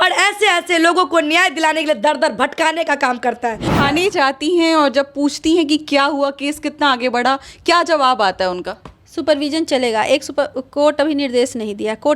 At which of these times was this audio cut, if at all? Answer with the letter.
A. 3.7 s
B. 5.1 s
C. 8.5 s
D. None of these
A